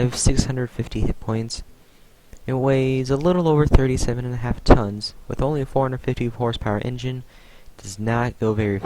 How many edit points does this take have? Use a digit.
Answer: 1